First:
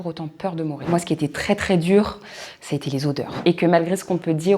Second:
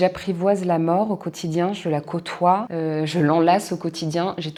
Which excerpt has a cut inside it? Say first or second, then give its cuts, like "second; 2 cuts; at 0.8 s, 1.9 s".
first; 2 cuts; at 0.8 s, 3.3 s